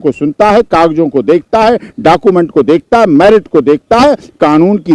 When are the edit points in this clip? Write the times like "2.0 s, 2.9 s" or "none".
none